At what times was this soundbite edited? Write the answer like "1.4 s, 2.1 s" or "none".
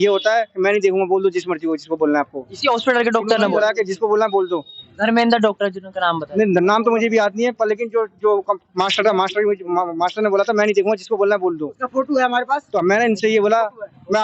none